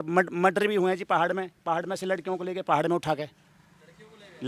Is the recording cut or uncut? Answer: uncut